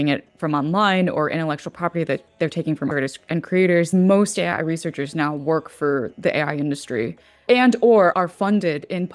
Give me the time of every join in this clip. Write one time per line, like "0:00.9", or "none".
0:02.9
0:03.9
0:07.4
0:08.1